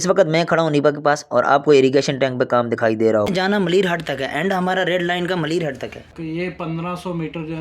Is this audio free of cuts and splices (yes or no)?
no